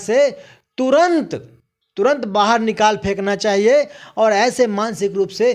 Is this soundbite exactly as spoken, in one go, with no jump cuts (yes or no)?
yes